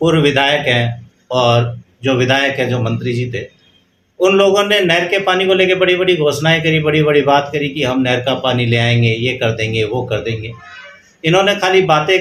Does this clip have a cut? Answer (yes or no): no